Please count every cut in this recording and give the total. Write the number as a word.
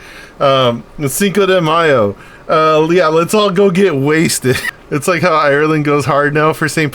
one